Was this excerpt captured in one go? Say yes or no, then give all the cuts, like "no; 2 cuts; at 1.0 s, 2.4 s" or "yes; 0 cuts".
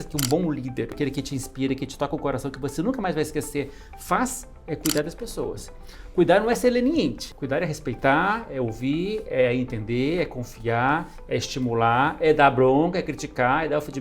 no; 2 cuts; at 0.9 s, 7.2 s